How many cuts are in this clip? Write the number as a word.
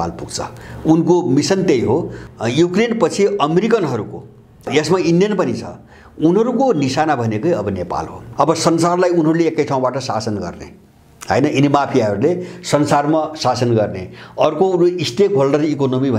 three